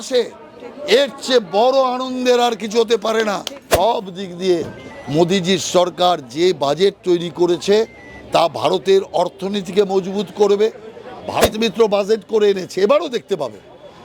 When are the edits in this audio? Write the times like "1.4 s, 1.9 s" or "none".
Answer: 3.6 s, 11.4 s